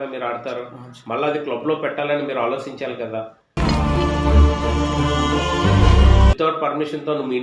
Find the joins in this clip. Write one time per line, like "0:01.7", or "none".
0:06.3